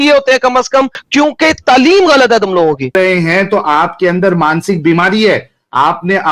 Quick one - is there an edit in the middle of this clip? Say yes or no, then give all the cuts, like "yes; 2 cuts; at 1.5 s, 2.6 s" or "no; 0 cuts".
yes; 2 cuts; at 1.0 s, 2.9 s